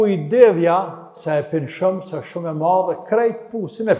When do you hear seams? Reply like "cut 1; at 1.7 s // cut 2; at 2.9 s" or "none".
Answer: none